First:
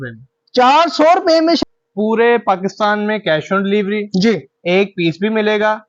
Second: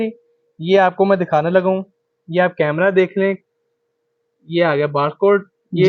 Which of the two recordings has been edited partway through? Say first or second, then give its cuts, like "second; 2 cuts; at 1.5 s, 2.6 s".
first; 1 cut; at 1.6 s